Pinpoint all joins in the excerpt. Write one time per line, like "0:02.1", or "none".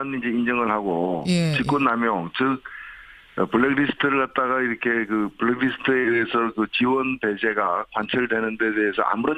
none